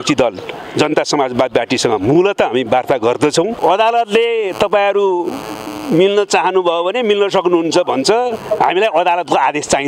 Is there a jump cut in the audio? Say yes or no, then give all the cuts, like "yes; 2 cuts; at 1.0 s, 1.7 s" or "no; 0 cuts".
yes; 1 cut; at 3.6 s